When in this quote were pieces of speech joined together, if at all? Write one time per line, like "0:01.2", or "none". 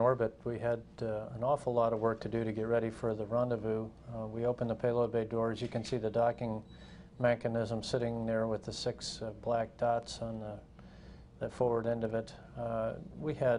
0:01.6